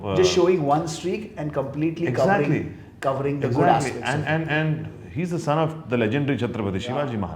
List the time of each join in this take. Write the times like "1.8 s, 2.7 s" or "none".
none